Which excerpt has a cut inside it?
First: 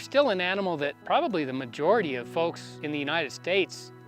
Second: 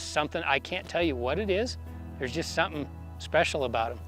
first; 2 cuts; at 0.9 s, 2.5 s

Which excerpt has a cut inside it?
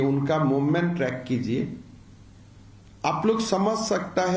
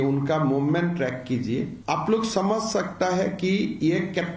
second; 1 cut; at 1.8 s

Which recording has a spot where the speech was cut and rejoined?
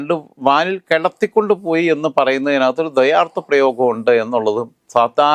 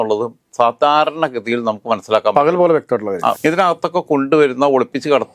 second; 1 cut; at 3.4 s

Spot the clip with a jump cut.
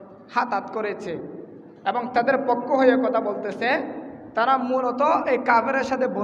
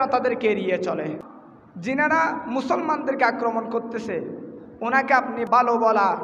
second; 2 cuts; at 1.3 s, 5.5 s

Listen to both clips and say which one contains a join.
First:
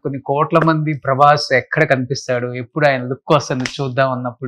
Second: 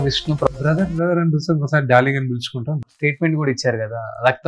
second; 1 cut; at 2.7 s

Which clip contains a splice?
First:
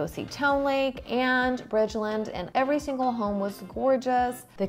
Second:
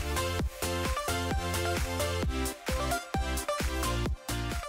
first; 2 cuts; at 1.0 s, 2.4 s

